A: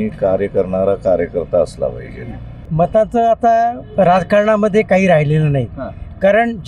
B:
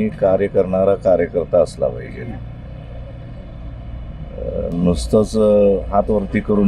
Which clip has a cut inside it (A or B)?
A